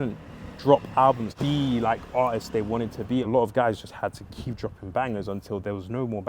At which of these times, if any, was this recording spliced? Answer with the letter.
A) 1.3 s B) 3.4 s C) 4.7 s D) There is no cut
A